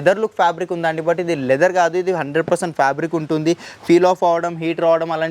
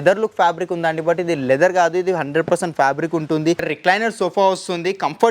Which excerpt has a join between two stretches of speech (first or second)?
second